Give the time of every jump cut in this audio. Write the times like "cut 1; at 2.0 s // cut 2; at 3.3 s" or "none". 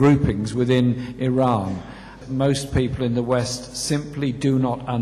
cut 1; at 2.1 s